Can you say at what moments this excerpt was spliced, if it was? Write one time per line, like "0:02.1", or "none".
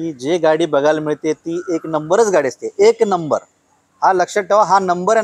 none

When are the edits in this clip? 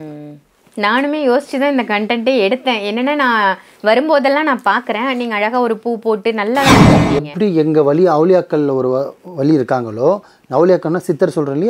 0:06.9

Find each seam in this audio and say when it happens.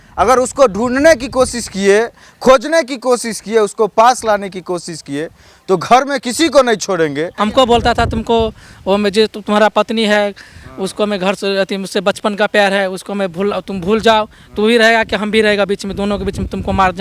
0:07.4

